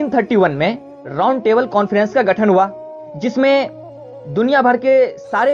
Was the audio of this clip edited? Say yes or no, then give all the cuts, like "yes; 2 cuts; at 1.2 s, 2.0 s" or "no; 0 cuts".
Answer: no; 0 cuts